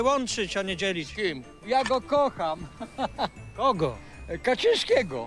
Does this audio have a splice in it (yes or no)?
yes